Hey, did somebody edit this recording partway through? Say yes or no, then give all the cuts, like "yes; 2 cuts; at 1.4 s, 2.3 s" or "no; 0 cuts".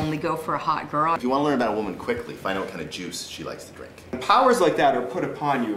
yes; 2 cuts; at 1.2 s, 4.1 s